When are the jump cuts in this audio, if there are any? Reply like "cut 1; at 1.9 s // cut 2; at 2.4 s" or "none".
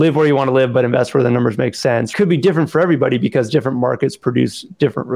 cut 1; at 2.1 s